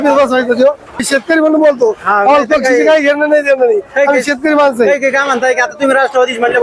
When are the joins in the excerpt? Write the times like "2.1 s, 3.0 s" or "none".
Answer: 1.1 s

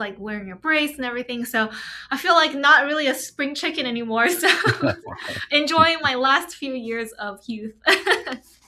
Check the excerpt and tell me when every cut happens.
none

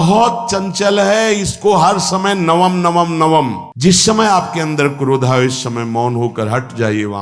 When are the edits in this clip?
3.6 s

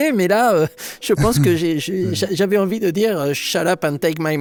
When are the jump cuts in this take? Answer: none

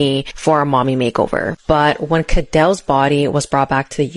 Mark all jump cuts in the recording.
1.5 s

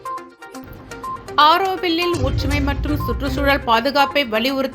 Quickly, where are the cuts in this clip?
1.3 s

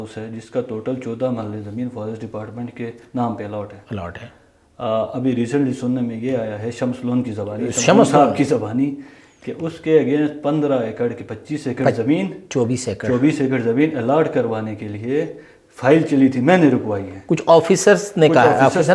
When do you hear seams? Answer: none

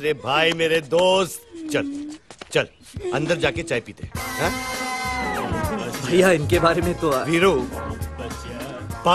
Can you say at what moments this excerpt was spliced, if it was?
8.2 s

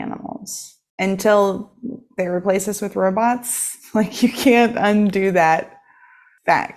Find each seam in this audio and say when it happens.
none

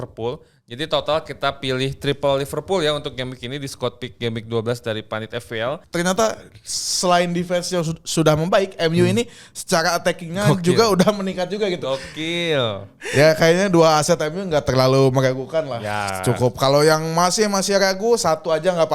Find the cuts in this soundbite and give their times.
5.8 s, 12.9 s

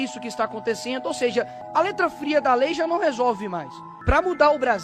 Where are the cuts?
1.6 s, 3.9 s

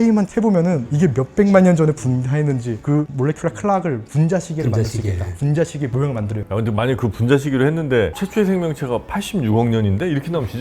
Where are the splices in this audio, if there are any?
2.8 s, 6.4 s

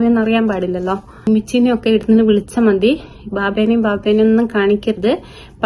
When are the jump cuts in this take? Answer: 1.3 s

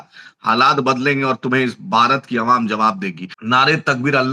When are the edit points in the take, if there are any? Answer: 3.3 s

